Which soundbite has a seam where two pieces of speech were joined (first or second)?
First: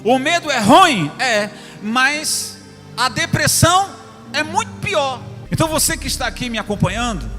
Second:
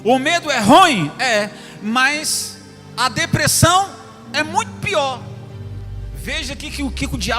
first